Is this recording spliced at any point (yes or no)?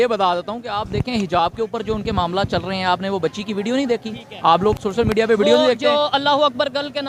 no